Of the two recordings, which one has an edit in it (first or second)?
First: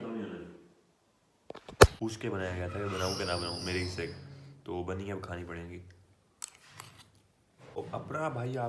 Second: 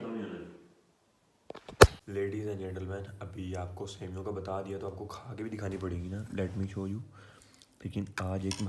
first